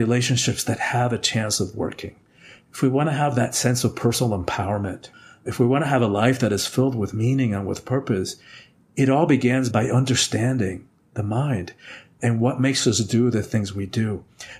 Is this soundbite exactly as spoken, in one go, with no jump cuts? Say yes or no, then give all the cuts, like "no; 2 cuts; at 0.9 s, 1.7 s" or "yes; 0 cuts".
no; 1 cut; at 5.0 s